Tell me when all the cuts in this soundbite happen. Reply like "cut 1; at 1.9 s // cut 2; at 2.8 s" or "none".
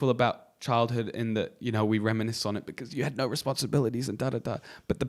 none